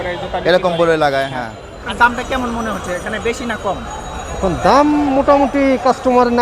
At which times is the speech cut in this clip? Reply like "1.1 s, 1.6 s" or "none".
1.9 s